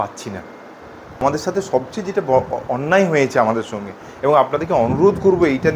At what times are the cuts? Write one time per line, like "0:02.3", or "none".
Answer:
0:01.2